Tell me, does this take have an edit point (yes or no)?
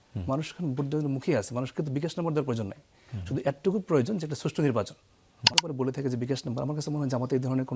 yes